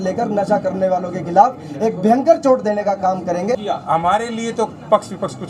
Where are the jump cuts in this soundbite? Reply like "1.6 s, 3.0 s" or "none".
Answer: 3.6 s

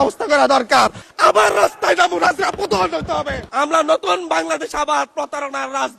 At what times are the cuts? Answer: 1.1 s, 3.5 s

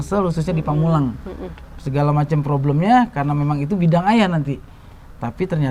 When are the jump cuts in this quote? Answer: none

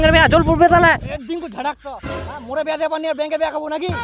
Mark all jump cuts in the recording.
1.0 s

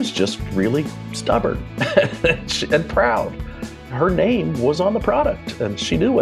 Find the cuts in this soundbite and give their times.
3.9 s, 4.8 s

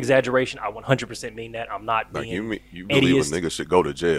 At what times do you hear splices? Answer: none

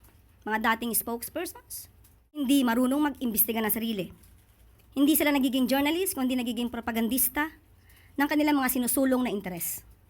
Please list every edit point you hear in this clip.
2.4 s

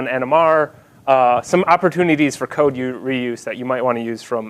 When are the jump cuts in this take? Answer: 2.8 s

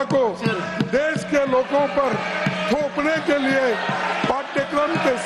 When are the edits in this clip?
none

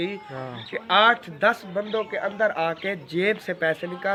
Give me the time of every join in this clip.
none

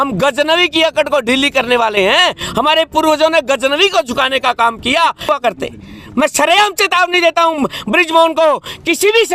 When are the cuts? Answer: 5.3 s

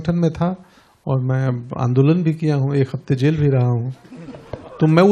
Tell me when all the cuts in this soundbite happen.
none

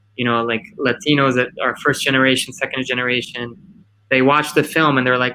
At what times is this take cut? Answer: none

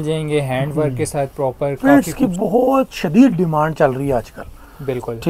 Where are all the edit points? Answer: 1.8 s

